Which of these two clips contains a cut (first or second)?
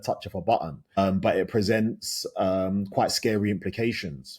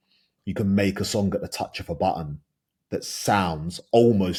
first